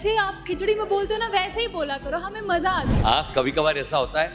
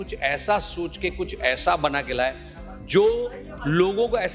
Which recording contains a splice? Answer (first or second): first